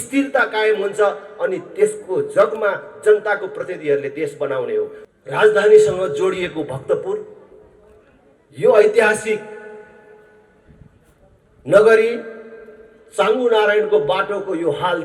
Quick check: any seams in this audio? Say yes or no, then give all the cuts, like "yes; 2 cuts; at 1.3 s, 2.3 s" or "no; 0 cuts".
yes; 1 cut; at 5.0 s